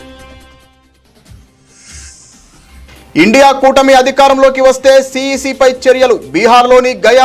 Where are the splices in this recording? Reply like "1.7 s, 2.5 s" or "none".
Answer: 3.1 s

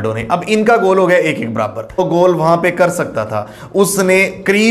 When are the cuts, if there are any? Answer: 2.0 s

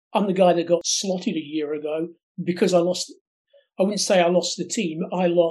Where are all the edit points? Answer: 0.9 s

